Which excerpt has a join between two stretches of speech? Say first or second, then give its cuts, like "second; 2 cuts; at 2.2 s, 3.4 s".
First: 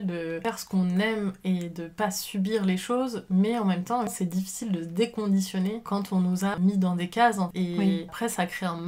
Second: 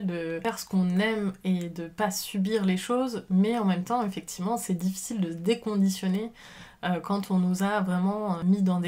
first; 3 cuts; at 4.1 s, 6.3 s, 7.5 s